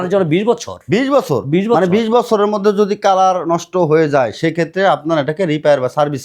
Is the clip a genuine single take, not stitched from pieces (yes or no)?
yes